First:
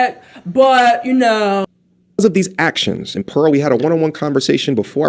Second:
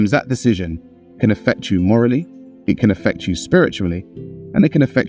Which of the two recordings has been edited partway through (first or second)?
first